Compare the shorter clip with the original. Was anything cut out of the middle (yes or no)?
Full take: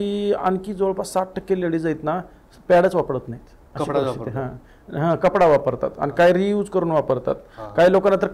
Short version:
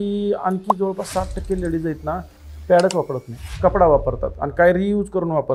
yes